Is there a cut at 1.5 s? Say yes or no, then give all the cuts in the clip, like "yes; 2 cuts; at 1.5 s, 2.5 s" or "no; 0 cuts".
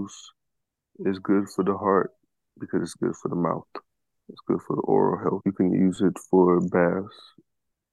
no; 1 cut; at 5.4 s